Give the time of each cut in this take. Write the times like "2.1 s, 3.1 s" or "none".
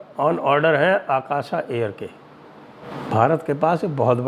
2.9 s